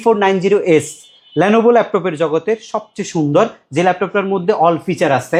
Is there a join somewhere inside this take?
no; 0 cuts

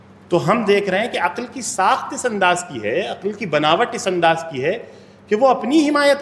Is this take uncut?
yes; 0 cuts

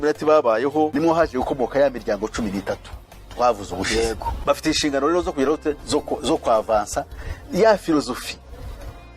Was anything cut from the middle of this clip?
yes; 2 cuts; at 0.9 s, 4.4 s

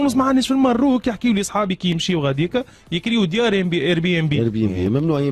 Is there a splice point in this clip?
no; 0 cuts

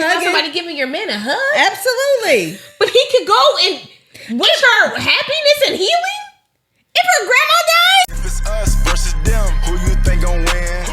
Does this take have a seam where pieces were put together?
yes; 1 cut; at 8.0 s

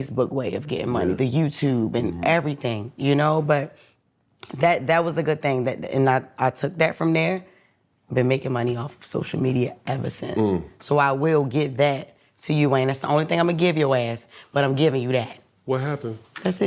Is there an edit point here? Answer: no; 0 cuts

